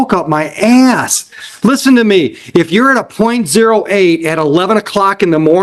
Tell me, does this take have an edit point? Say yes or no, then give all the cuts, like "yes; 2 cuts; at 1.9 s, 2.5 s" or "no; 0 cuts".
no; 0 cuts